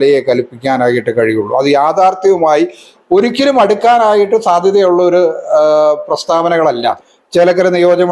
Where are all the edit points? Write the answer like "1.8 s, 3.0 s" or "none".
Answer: 7.1 s